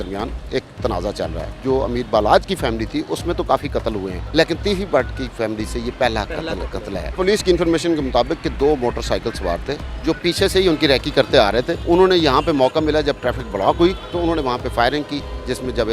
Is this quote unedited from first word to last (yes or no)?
no